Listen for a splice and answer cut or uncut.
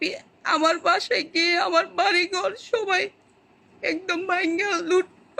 uncut